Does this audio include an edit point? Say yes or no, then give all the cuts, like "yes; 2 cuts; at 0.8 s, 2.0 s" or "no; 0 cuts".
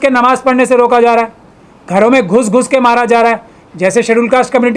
no; 0 cuts